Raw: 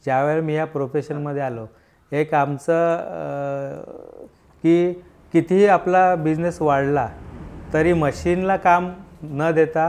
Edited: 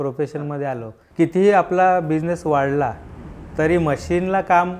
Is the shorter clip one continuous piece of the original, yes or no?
no